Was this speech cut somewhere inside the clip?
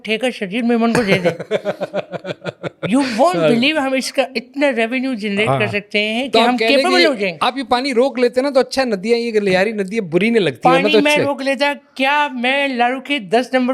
no; 0 cuts

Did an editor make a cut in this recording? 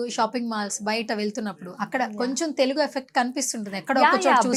no; 0 cuts

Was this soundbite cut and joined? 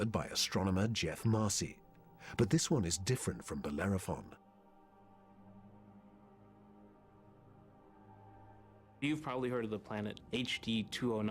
yes; 1 cut; at 4.4 s

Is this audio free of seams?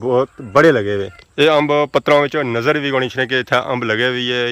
no; 1 cut; at 1.1 s

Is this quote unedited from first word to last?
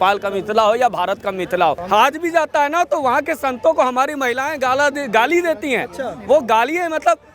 no; 1 cut; at 1.8 s

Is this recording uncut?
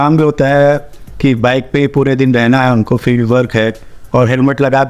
yes; 0 cuts

